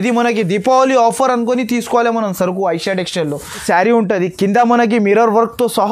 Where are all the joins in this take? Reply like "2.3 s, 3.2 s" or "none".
3.6 s